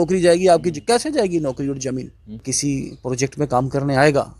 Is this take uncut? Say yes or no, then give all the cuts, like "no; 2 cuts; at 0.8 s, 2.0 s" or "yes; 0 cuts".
no; 1 cut; at 2.4 s